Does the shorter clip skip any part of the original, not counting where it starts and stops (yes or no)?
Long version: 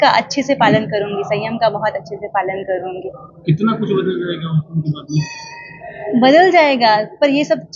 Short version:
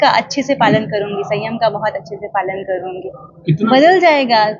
yes